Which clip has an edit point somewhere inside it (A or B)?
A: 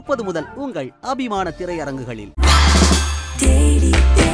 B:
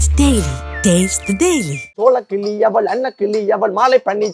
B